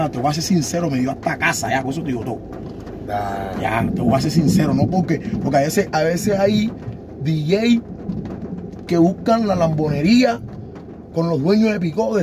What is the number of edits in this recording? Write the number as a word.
zero